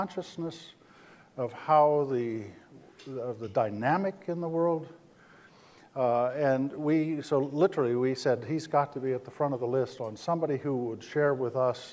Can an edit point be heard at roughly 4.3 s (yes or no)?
yes